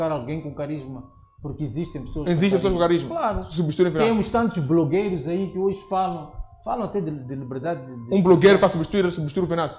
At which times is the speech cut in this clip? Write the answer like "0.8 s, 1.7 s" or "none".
none